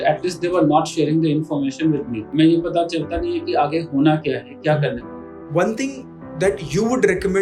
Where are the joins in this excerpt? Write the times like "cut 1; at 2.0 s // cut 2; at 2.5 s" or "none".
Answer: cut 1; at 2.2 s // cut 2; at 5.4 s